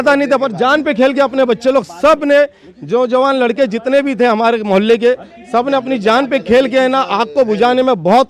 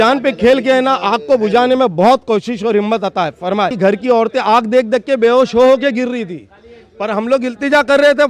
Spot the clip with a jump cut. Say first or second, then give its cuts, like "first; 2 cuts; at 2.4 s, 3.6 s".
second; 1 cut; at 3.7 s